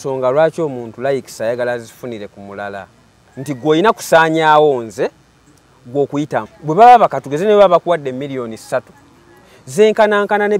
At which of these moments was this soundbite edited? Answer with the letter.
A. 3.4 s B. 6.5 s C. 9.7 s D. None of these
B